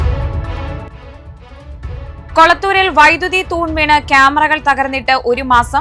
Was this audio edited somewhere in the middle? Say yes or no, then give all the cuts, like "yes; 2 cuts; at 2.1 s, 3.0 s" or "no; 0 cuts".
no; 0 cuts